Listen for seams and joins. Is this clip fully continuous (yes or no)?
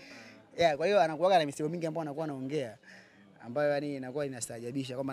yes